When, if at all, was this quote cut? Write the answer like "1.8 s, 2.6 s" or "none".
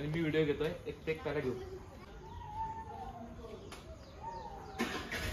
2.1 s